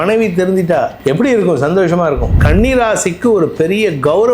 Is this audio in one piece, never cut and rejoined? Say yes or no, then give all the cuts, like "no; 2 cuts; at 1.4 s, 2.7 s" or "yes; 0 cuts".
no; 2 cuts; at 0.9 s, 2.3 s